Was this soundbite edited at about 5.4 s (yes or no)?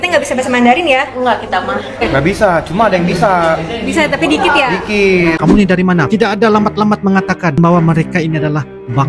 yes